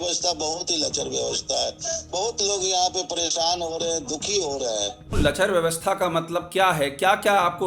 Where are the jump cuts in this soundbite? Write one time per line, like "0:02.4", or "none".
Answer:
0:05.1